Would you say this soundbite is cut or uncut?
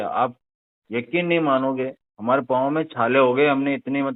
uncut